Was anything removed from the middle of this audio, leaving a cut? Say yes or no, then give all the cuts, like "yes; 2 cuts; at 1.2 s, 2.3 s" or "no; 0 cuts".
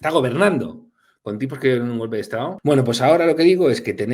yes; 1 cut; at 2.5 s